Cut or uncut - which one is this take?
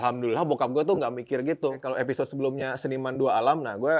cut